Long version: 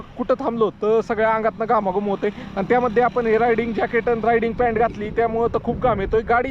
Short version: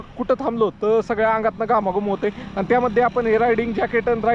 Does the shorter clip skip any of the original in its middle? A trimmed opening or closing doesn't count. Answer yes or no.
no